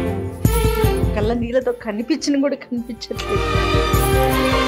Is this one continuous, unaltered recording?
yes; 0 cuts

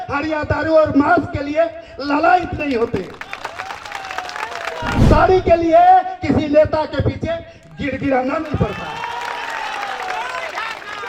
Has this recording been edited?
yes; 1 cut; at 4.9 s

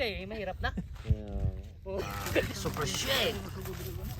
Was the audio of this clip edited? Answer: yes; 1 cut; at 2.5 s

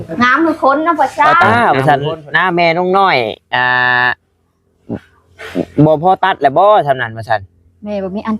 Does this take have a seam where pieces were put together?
yes; 1 cut; at 1.3 s

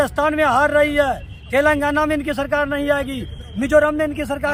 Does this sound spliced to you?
no; 0 cuts

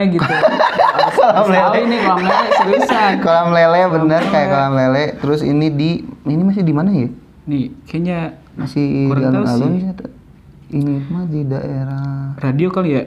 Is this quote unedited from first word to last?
yes; 0 cuts

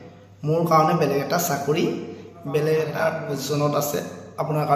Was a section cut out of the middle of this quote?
yes; 1 cut; at 3.1 s

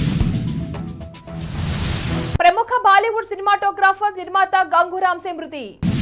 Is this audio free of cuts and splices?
yes; 0 cuts

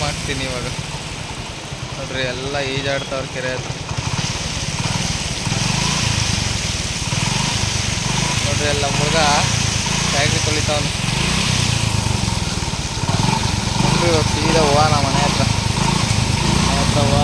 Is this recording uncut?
yes; 0 cuts

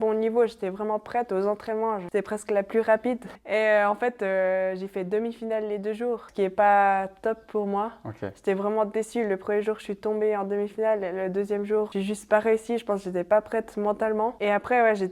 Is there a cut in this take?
yes; 5 cuts; at 2.0 s, 3.3 s, 6.3 s, 11.9 s, 14.4 s

